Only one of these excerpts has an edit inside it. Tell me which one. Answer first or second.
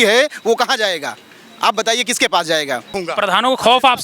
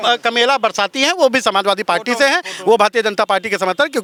first